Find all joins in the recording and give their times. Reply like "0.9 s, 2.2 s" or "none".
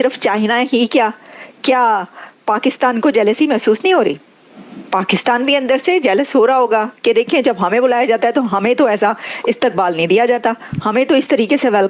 none